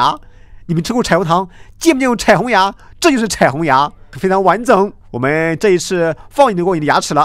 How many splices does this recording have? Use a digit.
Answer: 2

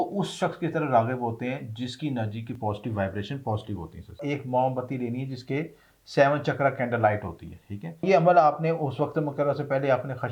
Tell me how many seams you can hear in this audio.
2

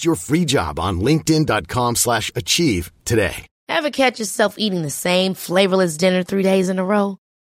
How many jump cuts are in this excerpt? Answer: 1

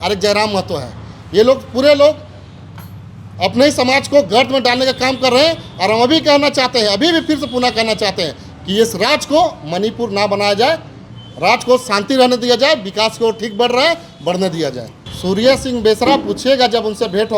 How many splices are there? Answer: 0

